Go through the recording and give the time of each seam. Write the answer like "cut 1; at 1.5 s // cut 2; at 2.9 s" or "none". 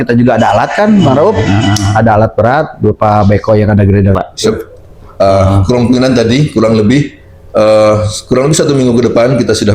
cut 1; at 4.1 s